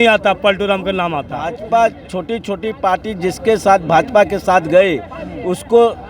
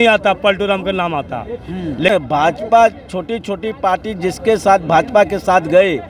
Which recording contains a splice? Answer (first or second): first